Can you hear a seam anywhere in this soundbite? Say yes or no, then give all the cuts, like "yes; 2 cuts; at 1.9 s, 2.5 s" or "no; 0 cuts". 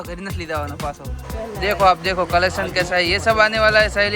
yes; 1 cut; at 1.1 s